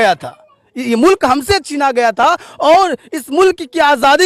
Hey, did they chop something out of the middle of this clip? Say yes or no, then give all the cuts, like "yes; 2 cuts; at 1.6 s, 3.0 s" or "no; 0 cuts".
no; 0 cuts